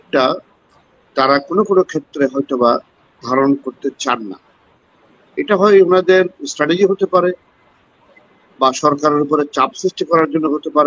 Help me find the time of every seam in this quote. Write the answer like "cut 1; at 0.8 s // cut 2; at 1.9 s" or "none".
none